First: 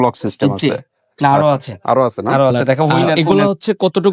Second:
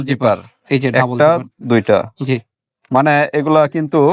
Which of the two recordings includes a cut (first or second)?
first